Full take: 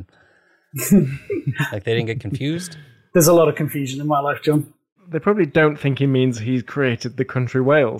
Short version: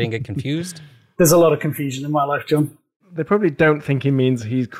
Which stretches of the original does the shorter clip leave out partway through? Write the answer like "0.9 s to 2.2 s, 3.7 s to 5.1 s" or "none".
none